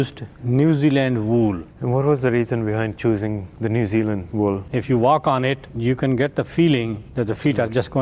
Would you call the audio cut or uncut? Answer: cut